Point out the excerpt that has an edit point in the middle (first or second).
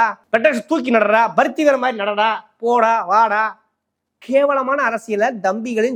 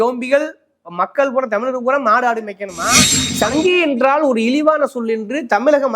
second